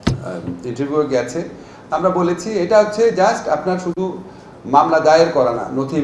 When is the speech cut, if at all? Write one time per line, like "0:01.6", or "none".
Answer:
none